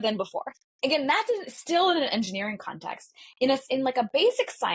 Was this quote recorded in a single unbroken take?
yes; 0 cuts

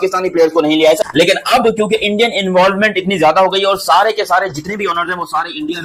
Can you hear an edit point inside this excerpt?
yes; 1 cut; at 1.0 s

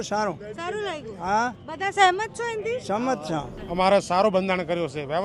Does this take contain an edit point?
yes; 1 cut; at 3.6 s

